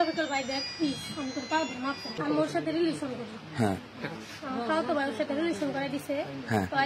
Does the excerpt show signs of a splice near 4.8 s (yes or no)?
no